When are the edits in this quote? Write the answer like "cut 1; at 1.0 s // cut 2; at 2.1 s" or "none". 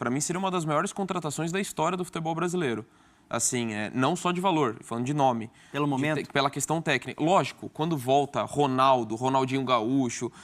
none